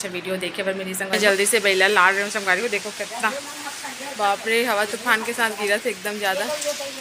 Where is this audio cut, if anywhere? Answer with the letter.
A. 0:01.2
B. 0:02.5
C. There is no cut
A